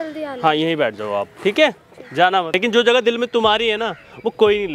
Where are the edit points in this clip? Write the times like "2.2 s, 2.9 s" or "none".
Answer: 2.5 s